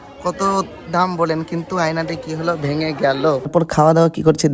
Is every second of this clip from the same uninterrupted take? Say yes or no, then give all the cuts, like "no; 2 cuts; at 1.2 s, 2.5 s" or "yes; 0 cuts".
no; 1 cut; at 3.5 s